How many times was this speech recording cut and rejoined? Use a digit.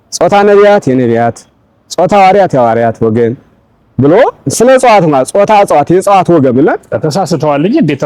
1